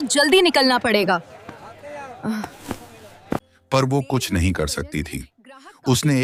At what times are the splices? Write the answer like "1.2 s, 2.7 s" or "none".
none